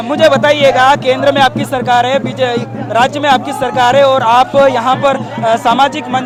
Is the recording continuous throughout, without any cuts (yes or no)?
yes